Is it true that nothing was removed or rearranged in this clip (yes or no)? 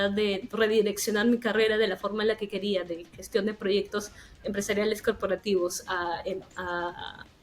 yes